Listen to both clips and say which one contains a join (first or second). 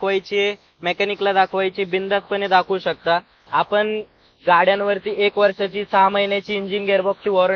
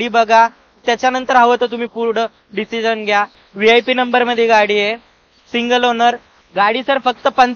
second